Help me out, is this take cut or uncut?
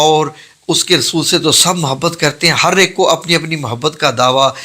uncut